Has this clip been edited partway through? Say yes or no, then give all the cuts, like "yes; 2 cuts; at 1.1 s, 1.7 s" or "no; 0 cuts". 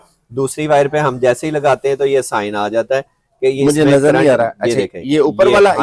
no; 0 cuts